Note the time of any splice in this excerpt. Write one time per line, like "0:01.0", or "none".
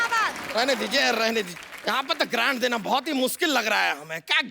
0:01.5